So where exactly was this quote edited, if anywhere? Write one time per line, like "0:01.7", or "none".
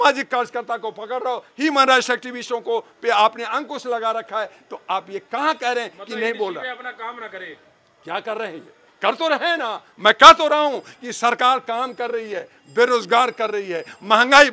none